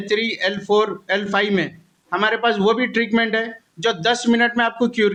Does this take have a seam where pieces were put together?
no; 0 cuts

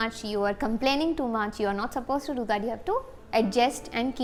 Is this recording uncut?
yes; 0 cuts

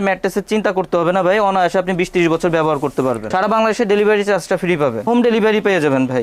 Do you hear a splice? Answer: yes; 2 cuts; at 3.2 s, 5.1 s

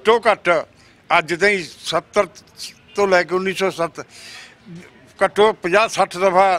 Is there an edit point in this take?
no; 0 cuts

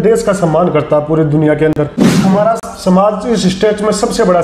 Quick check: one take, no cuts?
no; 1 cut; at 2.0 s

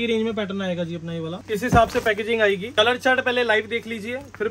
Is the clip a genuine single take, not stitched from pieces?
no; 2 cuts; at 1.4 s, 2.7 s

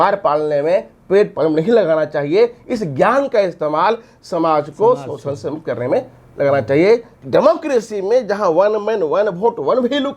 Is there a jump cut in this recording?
yes; 1 cut; at 7.1 s

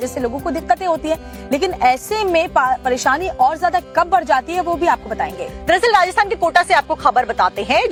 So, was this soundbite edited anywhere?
no; 0 cuts

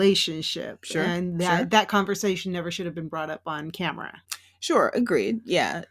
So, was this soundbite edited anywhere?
no; 0 cuts

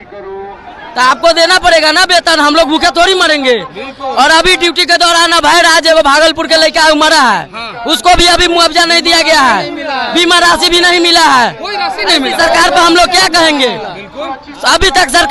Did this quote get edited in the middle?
no; 0 cuts

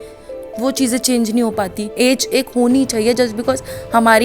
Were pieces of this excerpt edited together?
yes; 1 cut; at 1.9 s

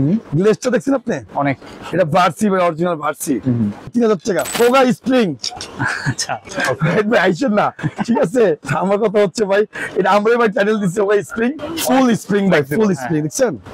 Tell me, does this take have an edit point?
yes; 3 cuts; at 4.1 s, 6.5 s, 11.6 s

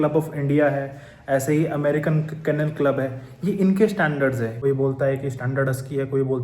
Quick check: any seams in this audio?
yes; 1 cut; at 4.5 s

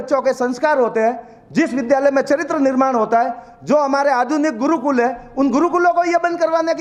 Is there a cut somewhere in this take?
no; 0 cuts

